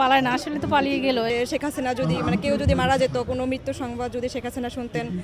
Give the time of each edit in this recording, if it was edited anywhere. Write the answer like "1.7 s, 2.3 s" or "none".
1.3 s